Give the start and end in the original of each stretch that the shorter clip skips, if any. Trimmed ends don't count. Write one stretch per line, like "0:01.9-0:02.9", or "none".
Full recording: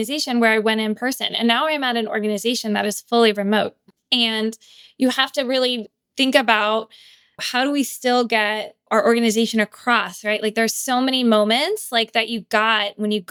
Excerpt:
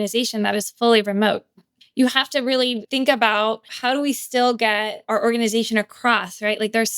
0:04.0-0:04.7
0:05.9-0:06.1
0:07.0-0:07.4
0:08.7-0:08.8